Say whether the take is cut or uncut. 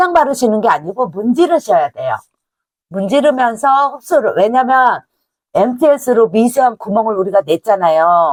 uncut